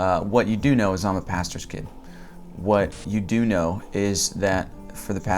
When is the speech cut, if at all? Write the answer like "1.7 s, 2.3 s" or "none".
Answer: 3.0 s